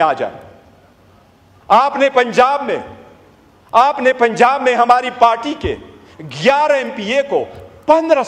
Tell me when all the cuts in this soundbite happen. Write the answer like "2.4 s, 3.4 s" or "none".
none